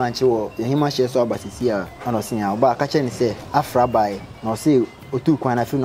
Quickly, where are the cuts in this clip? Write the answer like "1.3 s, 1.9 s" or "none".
1.9 s, 3.4 s, 4.3 s